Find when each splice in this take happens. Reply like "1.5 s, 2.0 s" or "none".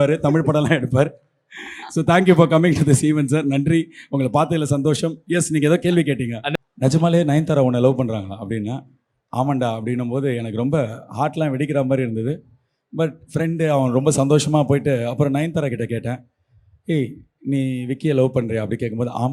6.4 s